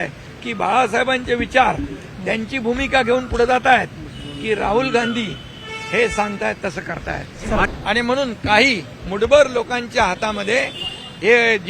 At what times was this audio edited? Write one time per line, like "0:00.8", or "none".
0:07.6